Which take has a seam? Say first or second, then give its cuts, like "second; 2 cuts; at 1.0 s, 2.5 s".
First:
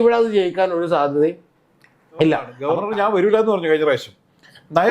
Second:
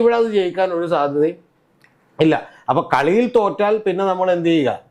first; 1 cut; at 2.5 s